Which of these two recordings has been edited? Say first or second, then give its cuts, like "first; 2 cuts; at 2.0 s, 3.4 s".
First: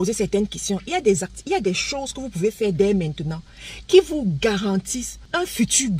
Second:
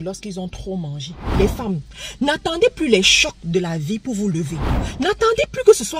second; 2 cuts; at 1.3 s, 4.7 s